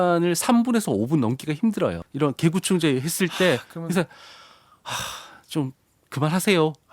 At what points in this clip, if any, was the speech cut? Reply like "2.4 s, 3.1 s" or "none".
2.0 s